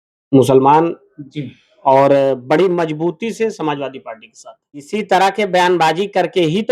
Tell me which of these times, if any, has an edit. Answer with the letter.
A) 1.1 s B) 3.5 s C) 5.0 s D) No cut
C